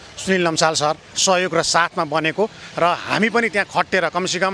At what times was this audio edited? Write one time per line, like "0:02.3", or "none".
0:01.1